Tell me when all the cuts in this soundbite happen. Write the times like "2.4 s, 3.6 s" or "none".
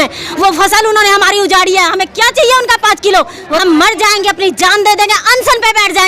3.5 s